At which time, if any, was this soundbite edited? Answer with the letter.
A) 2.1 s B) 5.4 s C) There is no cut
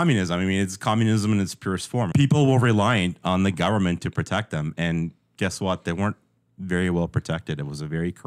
A